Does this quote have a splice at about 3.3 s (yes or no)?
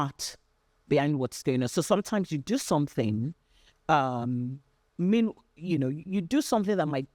no